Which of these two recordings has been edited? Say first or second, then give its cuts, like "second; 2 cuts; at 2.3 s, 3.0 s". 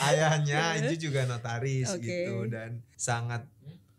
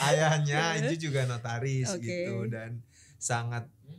first; 1 cut; at 2.9 s